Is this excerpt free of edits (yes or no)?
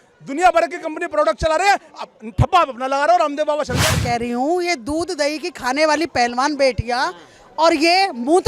no